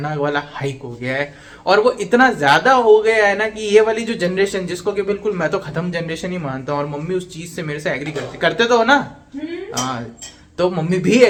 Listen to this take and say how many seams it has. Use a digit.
0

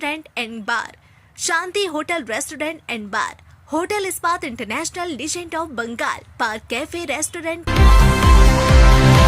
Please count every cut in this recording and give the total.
1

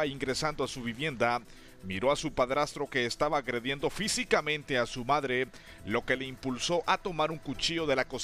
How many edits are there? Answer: 1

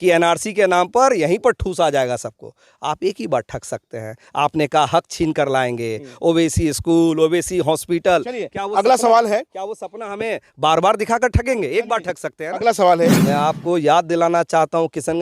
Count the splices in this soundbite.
1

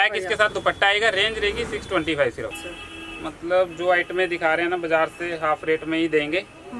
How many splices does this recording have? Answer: 1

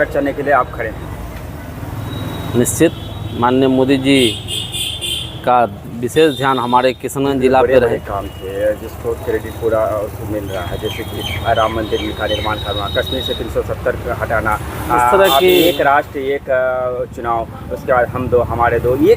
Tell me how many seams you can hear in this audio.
1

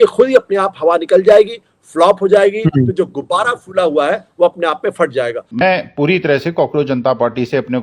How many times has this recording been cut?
1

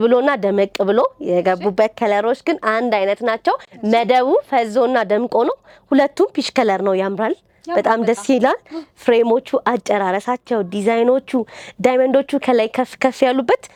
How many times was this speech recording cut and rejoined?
0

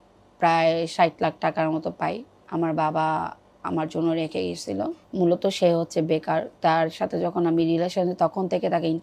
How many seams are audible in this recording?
1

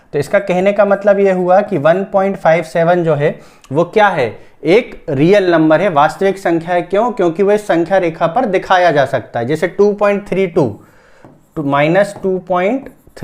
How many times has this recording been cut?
0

